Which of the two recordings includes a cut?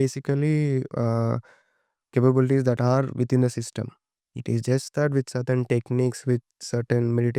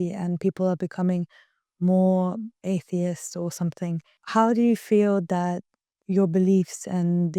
second; 2 cuts; at 2.6 s, 4.1 s

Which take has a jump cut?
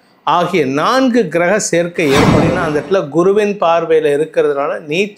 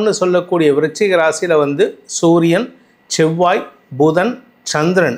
first; 1 cut; at 2.5 s

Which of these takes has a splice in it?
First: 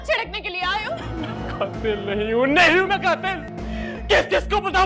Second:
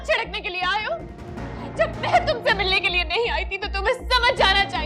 first; 2 cuts; at 1.1 s, 3.5 s

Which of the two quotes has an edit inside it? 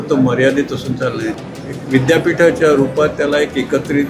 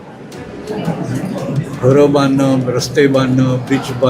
first; 1 cut; at 1.4 s

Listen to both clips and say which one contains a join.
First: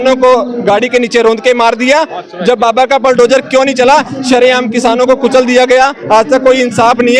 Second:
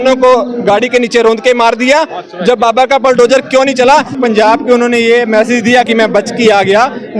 second; 1 cut; at 4.2 s

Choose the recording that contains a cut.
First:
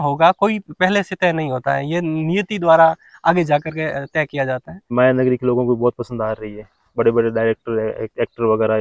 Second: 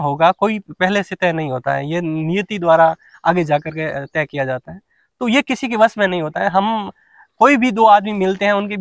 first; 1 cut; at 4.9 s

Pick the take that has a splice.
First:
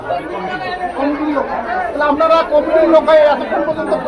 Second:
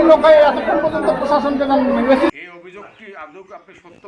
second; 1 cut; at 2.3 s

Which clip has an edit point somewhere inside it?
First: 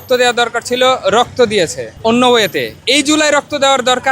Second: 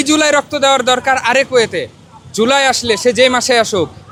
first; 1 cut; at 1.9 s

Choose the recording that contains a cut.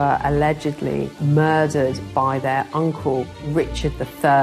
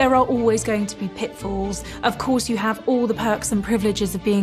first; 1 cut; at 3.4 s

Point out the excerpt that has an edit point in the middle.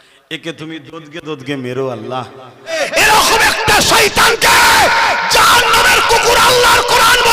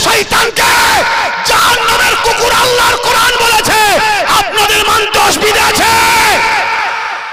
first; 1 cut; at 2.7 s

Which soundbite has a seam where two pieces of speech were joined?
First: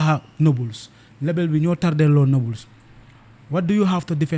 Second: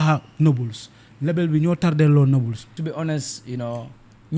second; 1 cut; at 2.8 s

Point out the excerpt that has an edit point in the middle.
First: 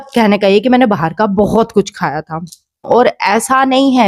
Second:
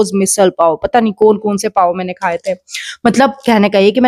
first; 1 cut; at 2.9 s

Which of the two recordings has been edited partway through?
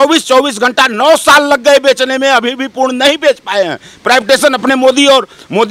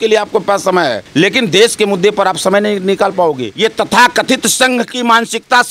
second; 2 cuts; at 1.0 s, 3.5 s

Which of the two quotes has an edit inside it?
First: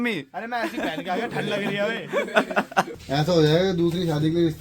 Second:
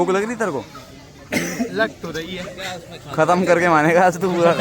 first; 1 cut; at 2.5 s

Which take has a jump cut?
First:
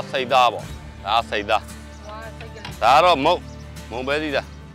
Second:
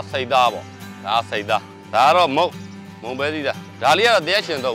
second; 2 cuts; at 1.8 s, 3.7 s

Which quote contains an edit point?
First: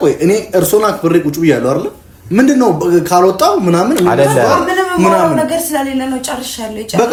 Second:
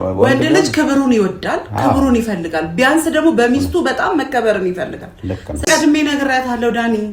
second; 1 cut; at 5.7 s

